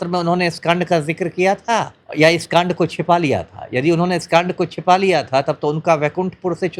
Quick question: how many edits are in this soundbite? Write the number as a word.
one